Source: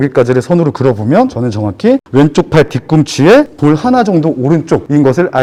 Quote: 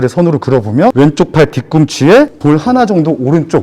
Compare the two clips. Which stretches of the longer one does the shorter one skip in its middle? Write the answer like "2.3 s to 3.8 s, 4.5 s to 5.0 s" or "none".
1.3 s to 2.1 s